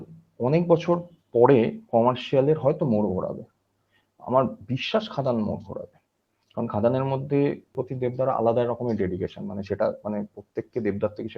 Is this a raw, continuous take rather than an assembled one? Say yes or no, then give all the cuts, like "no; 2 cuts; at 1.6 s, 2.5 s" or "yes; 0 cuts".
no; 1 cut; at 7.8 s